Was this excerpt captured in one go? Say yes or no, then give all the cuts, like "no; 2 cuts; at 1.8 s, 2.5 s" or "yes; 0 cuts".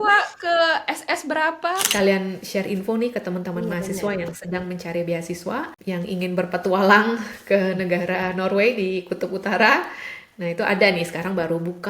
no; 2 cuts; at 1.9 s, 5.7 s